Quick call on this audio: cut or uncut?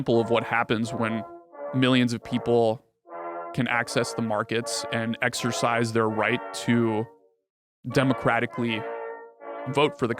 uncut